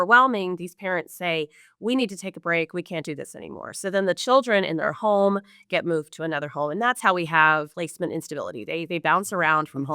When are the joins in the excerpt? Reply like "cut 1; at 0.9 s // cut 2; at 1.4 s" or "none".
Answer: cut 1; at 7.7 s